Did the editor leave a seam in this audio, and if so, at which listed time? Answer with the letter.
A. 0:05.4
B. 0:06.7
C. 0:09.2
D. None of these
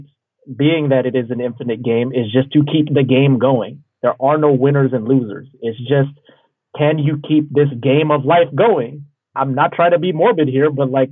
C